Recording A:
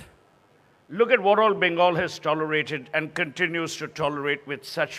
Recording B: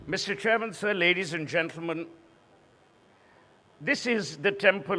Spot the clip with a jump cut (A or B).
B